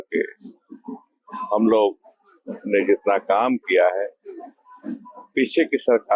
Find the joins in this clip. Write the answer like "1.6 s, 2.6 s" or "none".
none